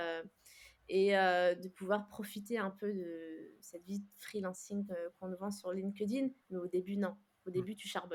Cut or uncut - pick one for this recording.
uncut